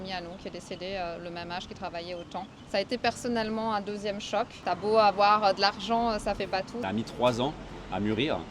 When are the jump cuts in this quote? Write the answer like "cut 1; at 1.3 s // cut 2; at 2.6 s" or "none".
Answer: cut 1; at 2.6 s // cut 2; at 4.6 s // cut 3; at 6.8 s

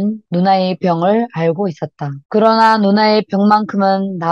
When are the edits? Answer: cut 1; at 2.1 s

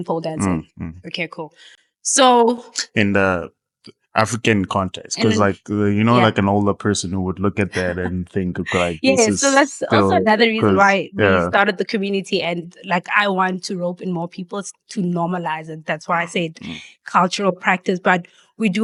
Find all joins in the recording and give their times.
none

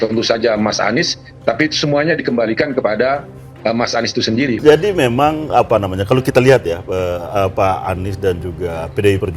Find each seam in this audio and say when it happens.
cut 1; at 4.6 s

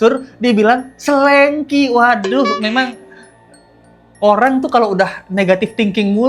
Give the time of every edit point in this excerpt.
none

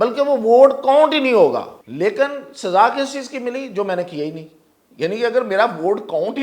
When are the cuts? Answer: cut 1; at 1.8 s

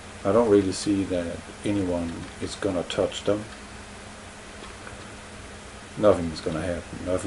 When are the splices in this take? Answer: cut 1; at 3.2 s

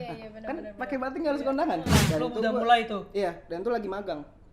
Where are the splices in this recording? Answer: cut 1; at 1.9 s

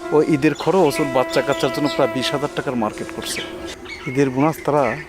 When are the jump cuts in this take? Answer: cut 1; at 3.9 s

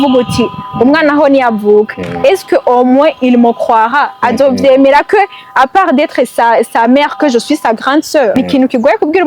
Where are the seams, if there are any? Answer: cut 1; at 8.3 s

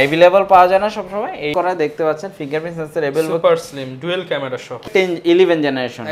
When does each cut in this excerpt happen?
cut 1; at 1.5 s // cut 2; at 4.8 s

